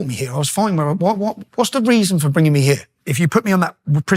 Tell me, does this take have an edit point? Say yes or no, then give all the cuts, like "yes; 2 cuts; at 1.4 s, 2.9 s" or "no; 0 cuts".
yes; 1 cut; at 3.0 s